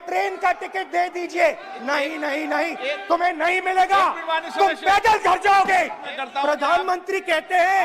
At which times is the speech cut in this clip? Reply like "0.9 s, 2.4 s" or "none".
6.1 s